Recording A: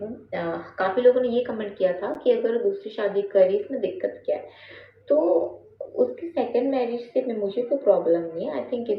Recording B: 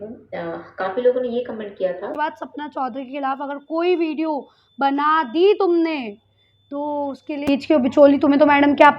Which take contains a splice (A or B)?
B